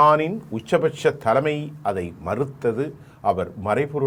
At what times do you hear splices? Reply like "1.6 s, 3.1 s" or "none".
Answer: none